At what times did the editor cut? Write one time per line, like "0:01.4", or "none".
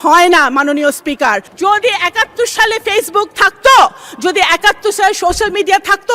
0:01.5